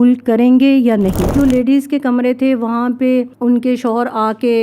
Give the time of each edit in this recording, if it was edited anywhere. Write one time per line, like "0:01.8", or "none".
0:01.3
0:03.3